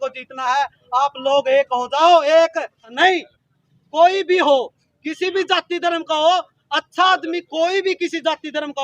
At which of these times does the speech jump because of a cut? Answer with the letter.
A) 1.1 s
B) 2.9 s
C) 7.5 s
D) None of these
B